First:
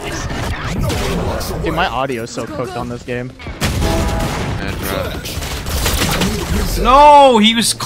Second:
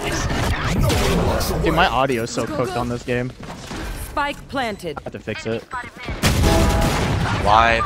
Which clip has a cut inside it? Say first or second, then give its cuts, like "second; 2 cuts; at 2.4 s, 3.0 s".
first; 2 cuts; at 3.4 s, 4.6 s